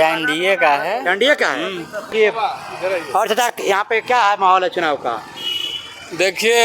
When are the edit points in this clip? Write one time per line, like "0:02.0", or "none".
0:02.1